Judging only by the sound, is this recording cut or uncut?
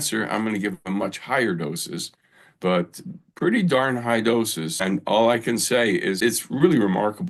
cut